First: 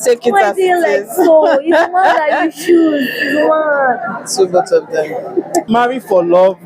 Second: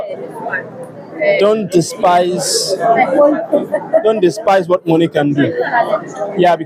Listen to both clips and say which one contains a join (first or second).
first